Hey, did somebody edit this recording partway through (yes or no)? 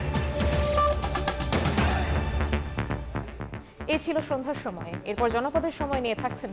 no